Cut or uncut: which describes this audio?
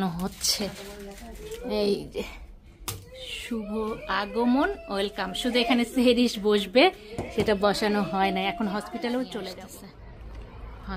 cut